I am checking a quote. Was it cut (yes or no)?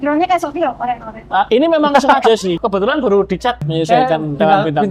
yes